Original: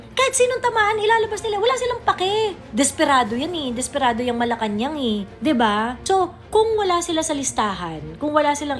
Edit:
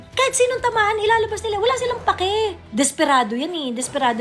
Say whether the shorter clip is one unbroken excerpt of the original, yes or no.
yes